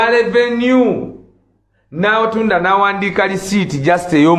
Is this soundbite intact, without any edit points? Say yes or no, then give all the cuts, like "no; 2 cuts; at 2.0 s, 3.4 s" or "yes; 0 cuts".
yes; 0 cuts